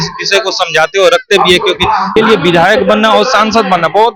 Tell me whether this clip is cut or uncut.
cut